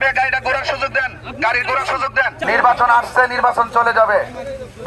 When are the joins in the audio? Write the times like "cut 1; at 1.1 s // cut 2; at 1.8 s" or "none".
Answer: cut 1; at 2.4 s

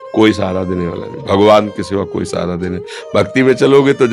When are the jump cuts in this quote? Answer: none

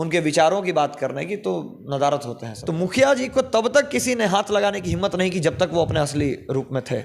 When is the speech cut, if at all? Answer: cut 1; at 2.5 s

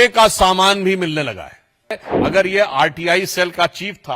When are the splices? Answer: cut 1; at 2.1 s

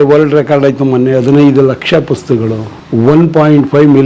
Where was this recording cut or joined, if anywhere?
cut 1; at 2.7 s

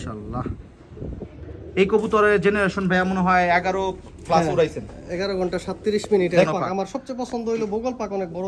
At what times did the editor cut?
cut 1; at 1.4 s // cut 2; at 6.5 s

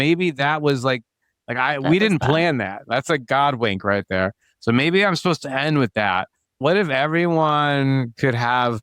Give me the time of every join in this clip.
cut 1; at 6.6 s

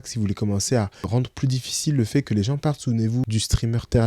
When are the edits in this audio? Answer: cut 1; at 1.1 s // cut 2; at 3.3 s

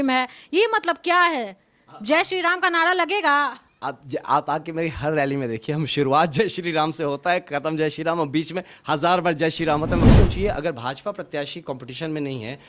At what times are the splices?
cut 1; at 10.0 s

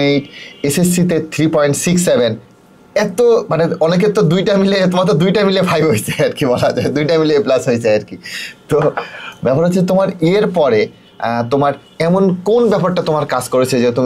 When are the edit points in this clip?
none

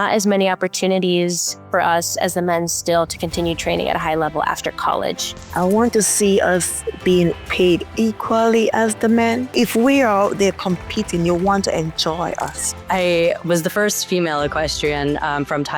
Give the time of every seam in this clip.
cut 1; at 5.4 s // cut 2; at 12.8 s

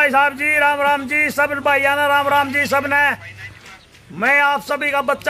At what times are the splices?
none

